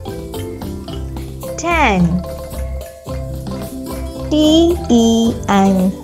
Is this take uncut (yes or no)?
yes